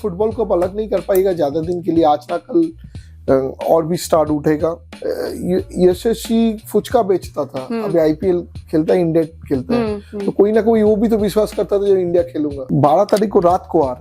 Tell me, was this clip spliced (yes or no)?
yes